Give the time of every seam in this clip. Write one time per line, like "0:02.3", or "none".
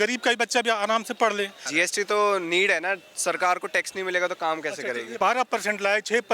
0:01.6
0:05.1